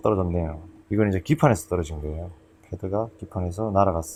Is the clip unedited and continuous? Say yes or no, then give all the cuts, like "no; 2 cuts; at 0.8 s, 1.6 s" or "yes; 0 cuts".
yes; 0 cuts